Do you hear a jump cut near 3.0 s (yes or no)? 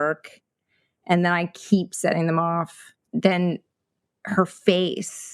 yes